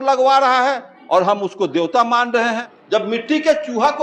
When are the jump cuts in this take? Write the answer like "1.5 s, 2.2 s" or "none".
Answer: 0.9 s, 2.6 s

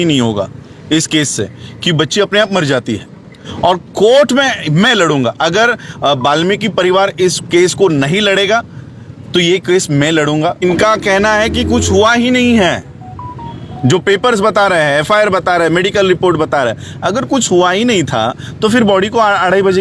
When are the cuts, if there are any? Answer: 3.4 s, 10.6 s

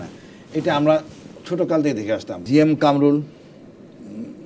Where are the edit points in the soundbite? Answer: 2.4 s

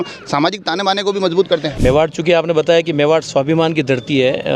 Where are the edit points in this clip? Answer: 1.7 s

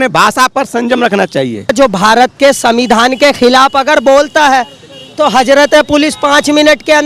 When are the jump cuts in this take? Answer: 1.7 s

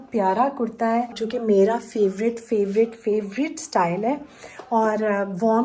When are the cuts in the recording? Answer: 1.2 s

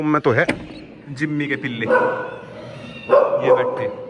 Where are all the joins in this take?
none

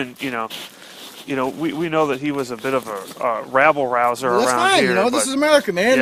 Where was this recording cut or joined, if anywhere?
none

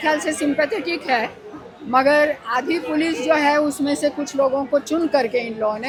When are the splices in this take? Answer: none

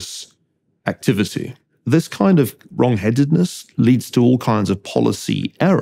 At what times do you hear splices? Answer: 1.9 s

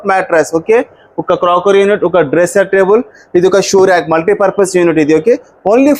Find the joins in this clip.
none

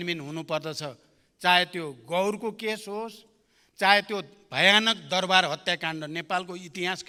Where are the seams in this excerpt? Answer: none

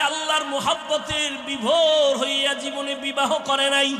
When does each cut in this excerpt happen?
none

